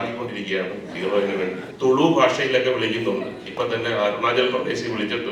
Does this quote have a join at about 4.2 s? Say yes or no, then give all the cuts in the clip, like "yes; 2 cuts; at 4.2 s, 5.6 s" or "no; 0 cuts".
no; 1 cut; at 1.7 s